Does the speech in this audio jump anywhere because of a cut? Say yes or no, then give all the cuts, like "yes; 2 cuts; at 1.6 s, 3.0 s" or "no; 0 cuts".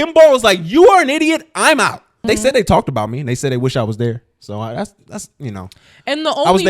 yes; 1 cut; at 2.2 s